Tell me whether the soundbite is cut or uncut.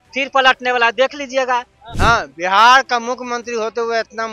cut